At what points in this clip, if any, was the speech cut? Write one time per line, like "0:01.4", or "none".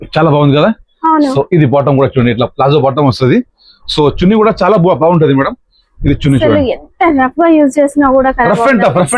none